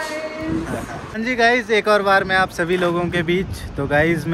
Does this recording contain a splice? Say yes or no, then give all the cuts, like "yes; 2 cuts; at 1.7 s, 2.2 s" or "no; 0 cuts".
yes; 1 cut; at 1.1 s